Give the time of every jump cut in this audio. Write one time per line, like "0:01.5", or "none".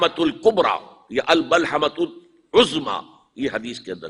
none